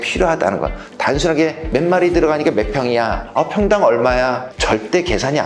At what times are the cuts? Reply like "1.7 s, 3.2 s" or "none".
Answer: 1.6 s, 3.2 s, 4.5 s